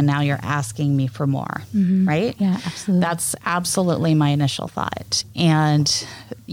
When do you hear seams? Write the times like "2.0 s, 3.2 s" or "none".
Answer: none